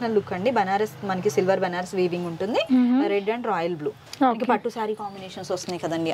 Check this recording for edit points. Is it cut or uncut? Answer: uncut